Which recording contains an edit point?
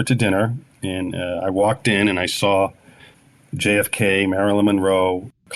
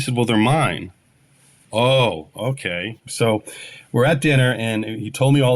second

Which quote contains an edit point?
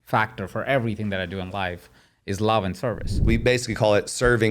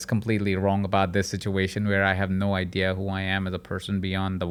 first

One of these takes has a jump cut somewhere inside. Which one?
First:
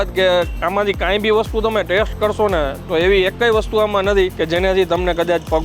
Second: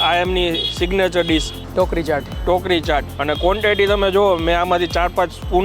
first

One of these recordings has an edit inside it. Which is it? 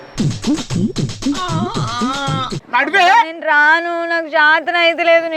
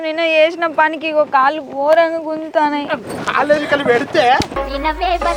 first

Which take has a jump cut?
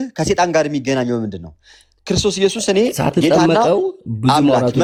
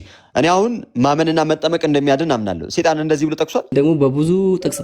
second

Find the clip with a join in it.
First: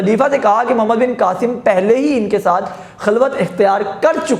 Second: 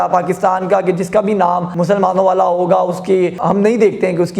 second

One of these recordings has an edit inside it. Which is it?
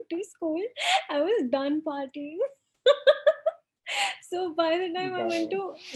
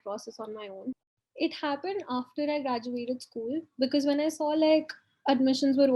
second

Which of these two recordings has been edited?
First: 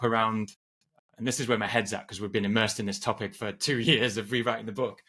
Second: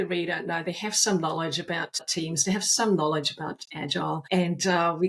second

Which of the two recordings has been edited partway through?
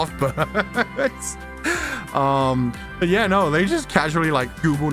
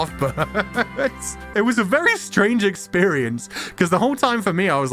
second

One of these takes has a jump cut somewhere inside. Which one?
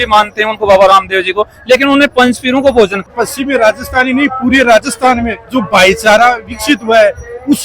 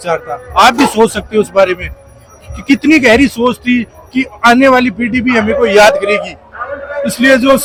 first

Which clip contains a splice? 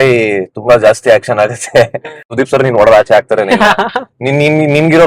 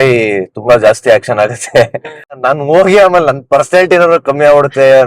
first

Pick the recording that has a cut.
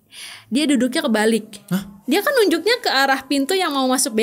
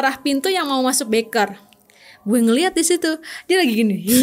first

